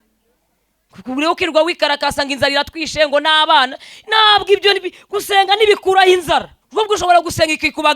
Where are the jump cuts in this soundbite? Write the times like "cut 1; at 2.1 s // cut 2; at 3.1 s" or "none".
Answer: cut 1; at 6.6 s